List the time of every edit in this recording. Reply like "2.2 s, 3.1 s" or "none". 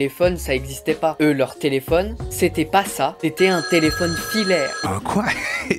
2.2 s, 4.8 s